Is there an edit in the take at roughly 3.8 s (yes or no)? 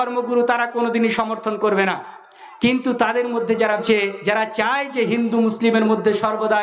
yes